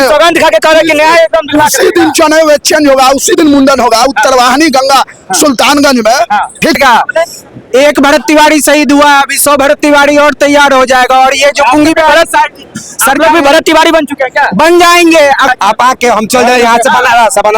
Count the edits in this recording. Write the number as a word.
two